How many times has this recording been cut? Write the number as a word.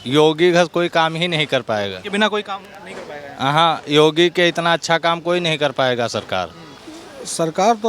one